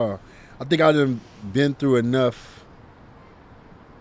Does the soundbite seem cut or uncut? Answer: uncut